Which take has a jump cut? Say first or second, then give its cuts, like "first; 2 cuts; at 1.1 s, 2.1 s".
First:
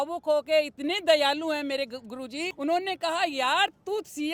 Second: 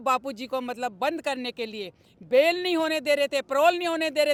first; 1 cut; at 2.5 s